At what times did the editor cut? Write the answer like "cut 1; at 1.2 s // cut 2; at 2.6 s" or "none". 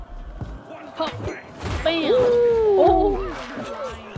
none